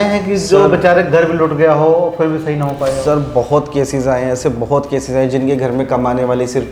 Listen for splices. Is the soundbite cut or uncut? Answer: uncut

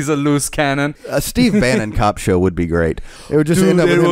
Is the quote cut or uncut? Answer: cut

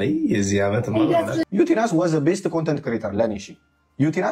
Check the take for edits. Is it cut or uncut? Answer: cut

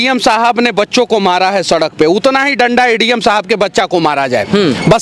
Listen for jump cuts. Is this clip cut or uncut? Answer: uncut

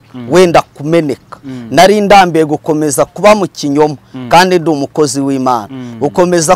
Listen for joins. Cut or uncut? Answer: uncut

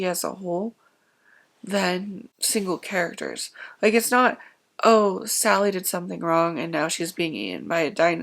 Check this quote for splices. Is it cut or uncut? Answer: cut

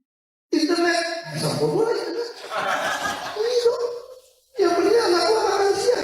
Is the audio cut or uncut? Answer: uncut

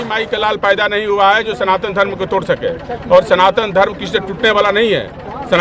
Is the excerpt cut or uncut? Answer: uncut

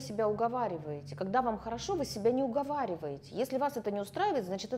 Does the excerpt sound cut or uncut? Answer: uncut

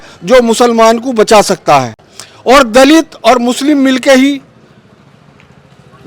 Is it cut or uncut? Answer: uncut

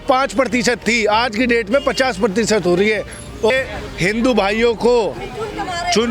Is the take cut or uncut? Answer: cut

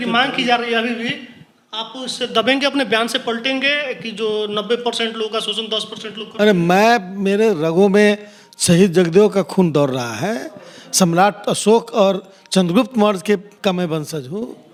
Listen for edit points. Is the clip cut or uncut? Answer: uncut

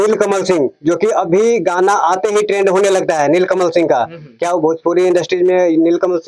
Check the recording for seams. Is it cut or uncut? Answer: uncut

